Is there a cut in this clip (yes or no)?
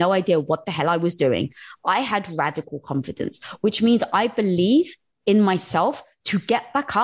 no